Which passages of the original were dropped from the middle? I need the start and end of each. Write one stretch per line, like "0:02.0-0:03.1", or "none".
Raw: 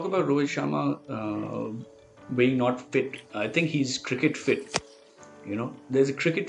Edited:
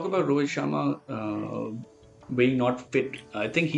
none

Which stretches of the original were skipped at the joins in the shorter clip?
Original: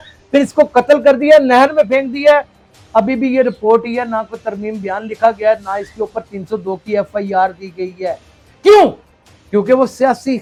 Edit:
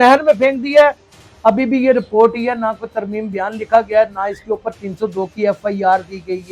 none

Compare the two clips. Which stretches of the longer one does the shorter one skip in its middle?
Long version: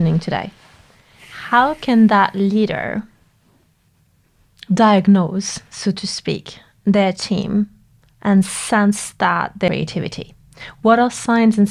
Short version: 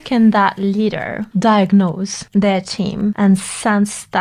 0:02.9-0:04.5
0:05.5-0:06.7
0:07.7-0:08.2

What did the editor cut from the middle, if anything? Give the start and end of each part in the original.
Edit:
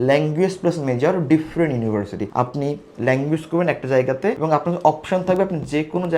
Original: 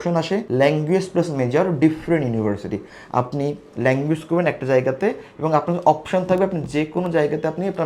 0:02.7-0:03.0
0:05.2-0:05.4

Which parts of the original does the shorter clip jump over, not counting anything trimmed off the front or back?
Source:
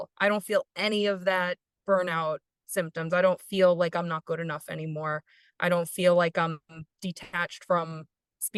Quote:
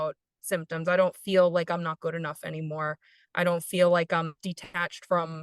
0:06.6-0:06.9

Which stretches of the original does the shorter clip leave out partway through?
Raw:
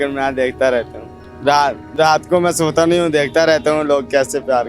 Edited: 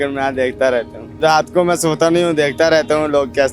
0:01.1-0:01.8

